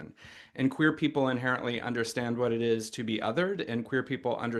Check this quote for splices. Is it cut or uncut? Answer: uncut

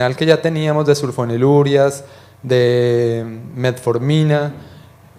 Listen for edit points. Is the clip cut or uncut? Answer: uncut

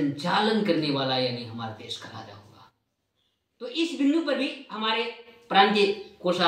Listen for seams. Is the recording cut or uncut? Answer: uncut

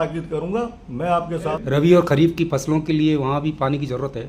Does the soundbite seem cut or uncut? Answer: cut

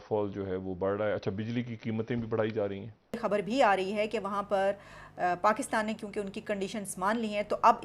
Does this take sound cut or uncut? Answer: cut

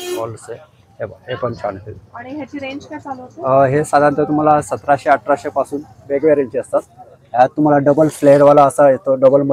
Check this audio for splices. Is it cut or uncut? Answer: uncut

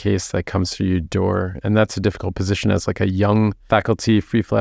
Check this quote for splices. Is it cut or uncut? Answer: cut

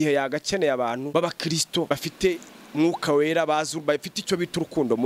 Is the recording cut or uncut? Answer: cut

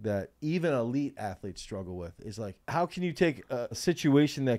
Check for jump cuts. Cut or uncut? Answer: cut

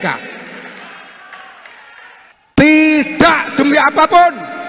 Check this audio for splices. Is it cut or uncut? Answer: cut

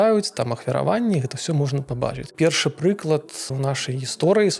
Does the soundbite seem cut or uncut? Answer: cut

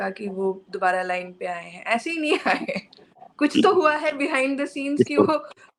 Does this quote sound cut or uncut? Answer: uncut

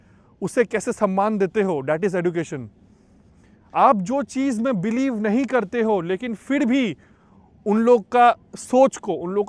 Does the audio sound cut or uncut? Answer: uncut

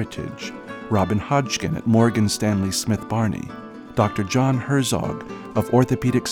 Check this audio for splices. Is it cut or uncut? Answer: uncut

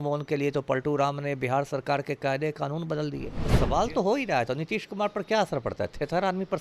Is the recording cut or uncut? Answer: cut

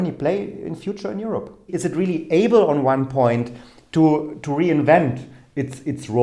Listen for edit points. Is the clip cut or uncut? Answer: cut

